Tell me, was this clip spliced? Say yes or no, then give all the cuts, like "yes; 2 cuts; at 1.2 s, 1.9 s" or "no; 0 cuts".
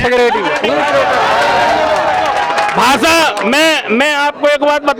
no; 0 cuts